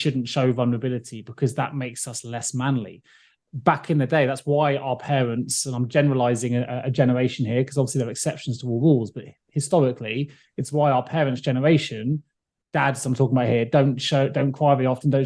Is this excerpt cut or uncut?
uncut